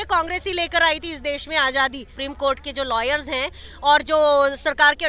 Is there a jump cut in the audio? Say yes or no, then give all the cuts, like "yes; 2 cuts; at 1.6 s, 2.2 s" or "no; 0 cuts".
yes; 1 cut; at 2.1 s